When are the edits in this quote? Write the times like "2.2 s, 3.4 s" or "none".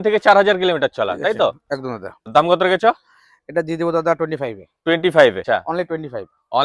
2.3 s, 5.4 s